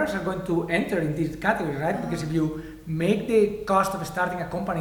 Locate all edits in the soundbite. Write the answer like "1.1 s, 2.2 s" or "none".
none